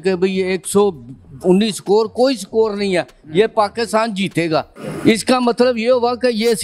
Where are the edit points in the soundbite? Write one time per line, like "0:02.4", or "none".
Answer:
0:04.8